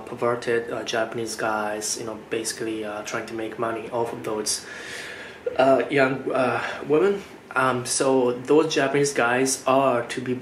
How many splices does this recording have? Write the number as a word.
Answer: zero